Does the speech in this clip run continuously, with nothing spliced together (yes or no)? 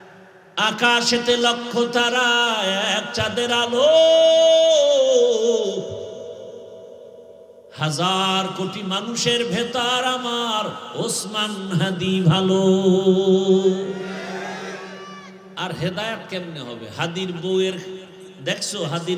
no